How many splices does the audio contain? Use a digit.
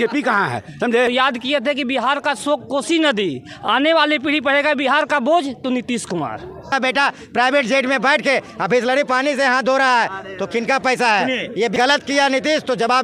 3